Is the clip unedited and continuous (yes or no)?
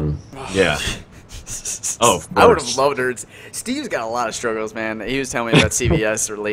yes